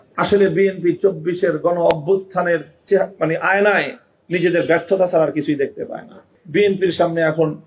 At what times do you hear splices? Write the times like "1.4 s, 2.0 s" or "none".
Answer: 6.3 s